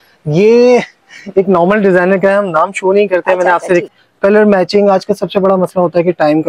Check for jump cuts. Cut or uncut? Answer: cut